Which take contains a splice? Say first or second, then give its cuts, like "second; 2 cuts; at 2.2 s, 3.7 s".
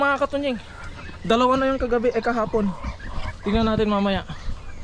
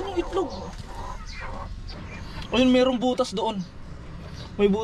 second; 1 cut; at 1.9 s